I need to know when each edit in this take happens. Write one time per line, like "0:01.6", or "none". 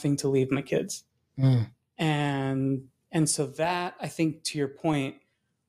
none